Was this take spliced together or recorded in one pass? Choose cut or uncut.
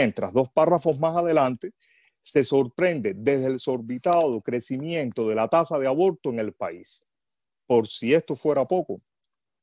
uncut